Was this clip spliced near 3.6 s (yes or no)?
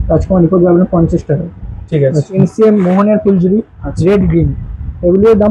no